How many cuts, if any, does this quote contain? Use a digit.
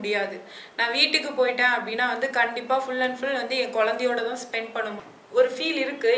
1